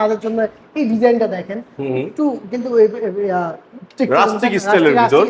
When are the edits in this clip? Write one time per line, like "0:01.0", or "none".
none